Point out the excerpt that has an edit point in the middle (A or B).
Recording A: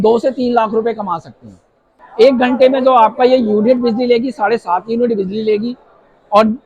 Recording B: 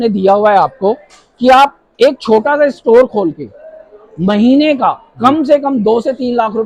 A